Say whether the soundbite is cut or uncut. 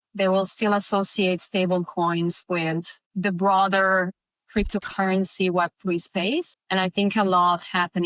cut